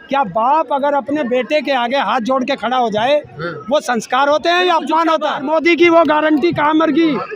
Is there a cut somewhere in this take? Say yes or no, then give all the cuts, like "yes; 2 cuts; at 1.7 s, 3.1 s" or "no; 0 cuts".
yes; 1 cut; at 5.4 s